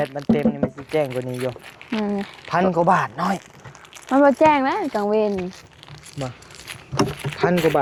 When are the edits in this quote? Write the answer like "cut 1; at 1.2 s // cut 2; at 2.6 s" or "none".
none